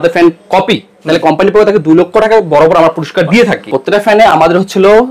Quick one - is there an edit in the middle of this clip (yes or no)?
yes